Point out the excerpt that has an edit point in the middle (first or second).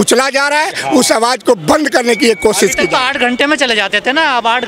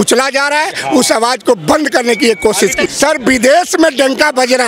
second